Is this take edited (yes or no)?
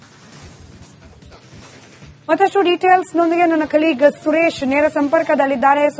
no